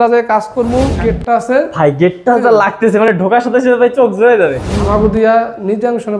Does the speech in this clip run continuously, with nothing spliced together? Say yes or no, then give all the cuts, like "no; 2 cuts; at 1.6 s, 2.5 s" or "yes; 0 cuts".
no; 2 cuts; at 1.0 s, 4.9 s